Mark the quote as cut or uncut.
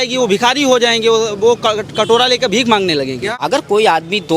cut